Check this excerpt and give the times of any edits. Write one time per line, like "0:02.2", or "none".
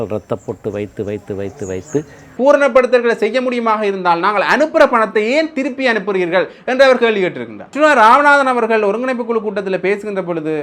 0:02.3
0:07.7